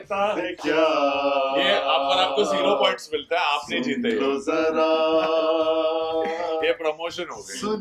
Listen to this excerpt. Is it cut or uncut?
uncut